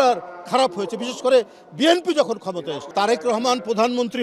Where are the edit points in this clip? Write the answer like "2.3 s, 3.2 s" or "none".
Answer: 2.8 s

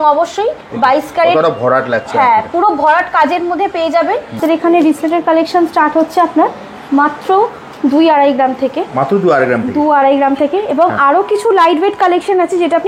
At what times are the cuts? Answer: 4.4 s

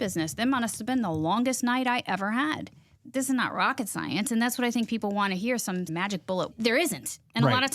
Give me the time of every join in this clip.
3.0 s, 5.9 s

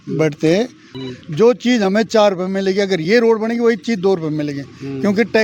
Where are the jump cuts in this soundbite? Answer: 0.9 s

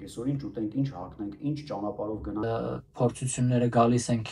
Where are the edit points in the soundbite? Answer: 2.4 s

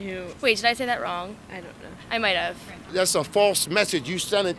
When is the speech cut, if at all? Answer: 2.8 s

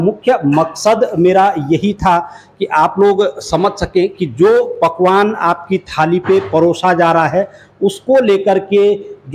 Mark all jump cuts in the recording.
none

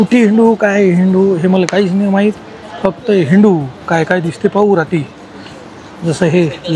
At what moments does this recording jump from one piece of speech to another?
none

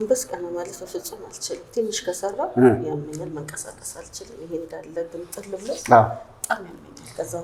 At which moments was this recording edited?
none

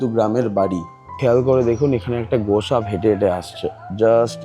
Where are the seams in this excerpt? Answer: 1.1 s

